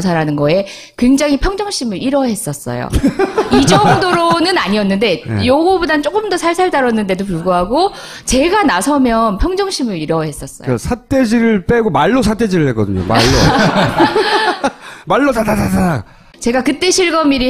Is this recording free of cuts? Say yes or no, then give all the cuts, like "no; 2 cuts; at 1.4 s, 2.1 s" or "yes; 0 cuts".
no; 1 cut; at 8.6 s